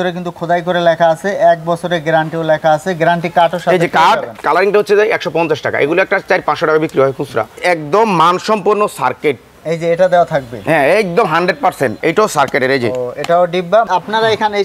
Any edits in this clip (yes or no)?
yes